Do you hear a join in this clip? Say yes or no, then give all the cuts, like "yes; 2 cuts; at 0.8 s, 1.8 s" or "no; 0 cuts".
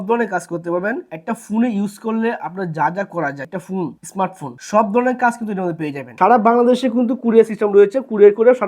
yes; 1 cut; at 6.0 s